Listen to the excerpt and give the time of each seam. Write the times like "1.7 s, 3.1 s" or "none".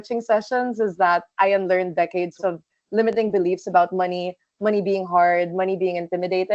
2.4 s